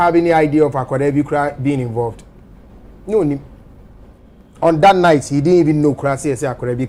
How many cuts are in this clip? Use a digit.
0